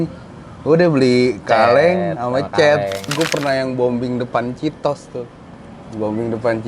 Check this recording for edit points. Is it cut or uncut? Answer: cut